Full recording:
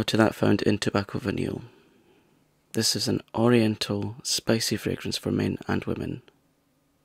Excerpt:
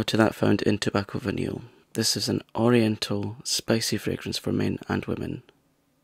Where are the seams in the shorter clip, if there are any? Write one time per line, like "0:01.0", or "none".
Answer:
0:01.7